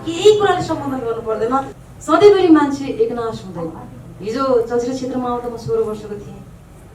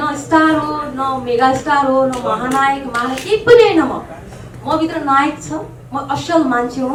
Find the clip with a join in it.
first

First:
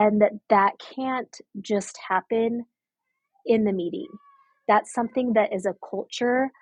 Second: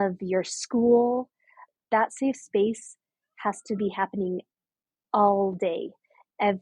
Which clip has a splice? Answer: second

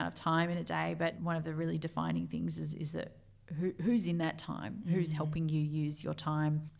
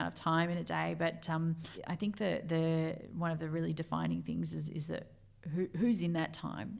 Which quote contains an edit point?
first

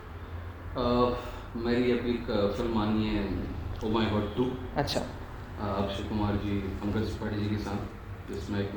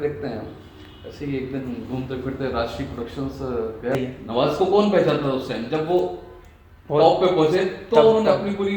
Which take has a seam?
second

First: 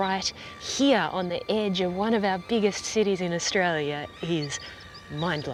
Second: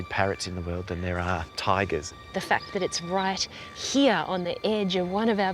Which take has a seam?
second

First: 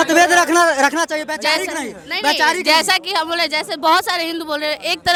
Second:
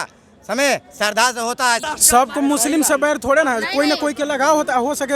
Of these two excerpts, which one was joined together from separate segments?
second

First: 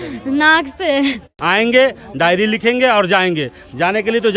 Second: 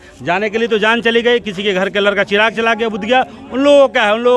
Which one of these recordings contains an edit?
first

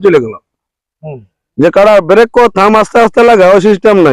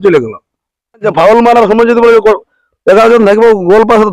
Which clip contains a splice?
second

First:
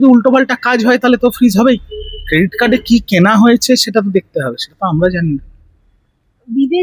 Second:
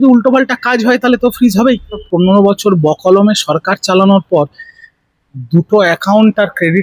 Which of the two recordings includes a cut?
second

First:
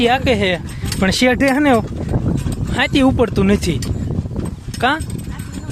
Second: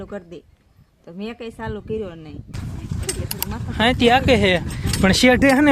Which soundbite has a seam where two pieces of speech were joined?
second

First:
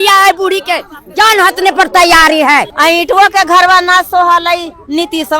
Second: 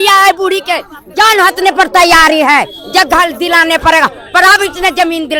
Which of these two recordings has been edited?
first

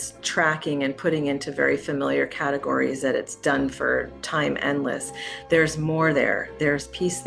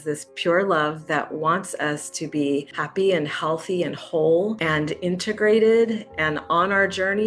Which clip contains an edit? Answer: second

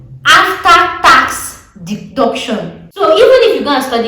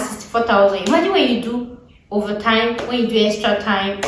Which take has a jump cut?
first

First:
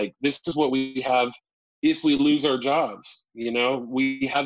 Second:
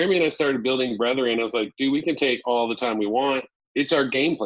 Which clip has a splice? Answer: second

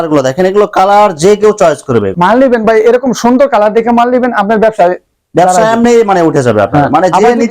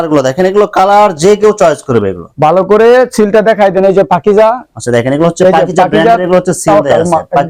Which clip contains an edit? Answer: first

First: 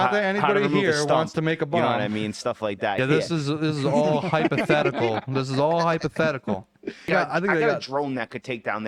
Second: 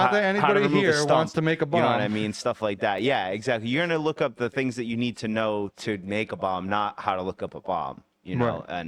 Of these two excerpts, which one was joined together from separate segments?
first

